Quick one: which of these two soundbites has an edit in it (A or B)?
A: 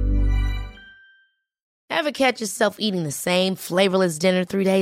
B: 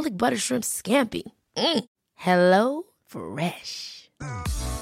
A